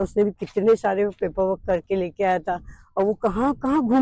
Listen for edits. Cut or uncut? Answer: uncut